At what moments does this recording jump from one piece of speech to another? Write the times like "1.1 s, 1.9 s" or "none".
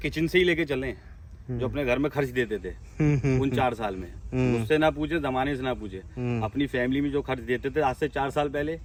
none